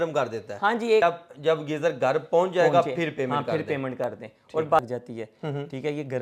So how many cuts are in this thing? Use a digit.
2